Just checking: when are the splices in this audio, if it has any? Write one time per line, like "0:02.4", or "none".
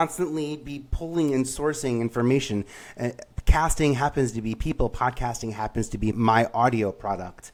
none